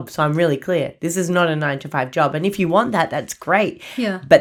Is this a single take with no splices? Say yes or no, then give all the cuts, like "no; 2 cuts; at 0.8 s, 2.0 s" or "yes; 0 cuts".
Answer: yes; 0 cuts